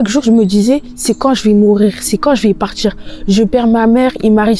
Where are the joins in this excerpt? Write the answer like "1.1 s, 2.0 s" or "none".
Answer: none